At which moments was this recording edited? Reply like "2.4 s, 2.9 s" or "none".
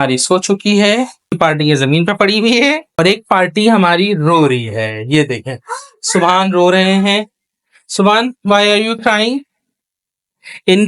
1.4 s, 3.0 s